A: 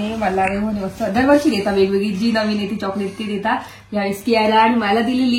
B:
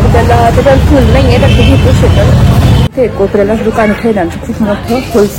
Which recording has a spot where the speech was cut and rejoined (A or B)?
B